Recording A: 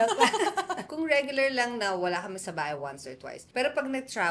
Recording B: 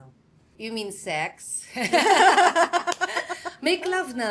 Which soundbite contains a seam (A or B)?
A